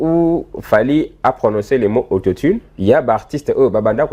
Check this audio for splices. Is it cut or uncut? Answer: cut